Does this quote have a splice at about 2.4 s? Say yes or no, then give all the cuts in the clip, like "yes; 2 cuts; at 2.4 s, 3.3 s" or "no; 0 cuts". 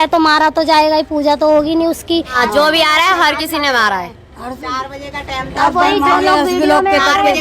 yes; 1 cut; at 2.4 s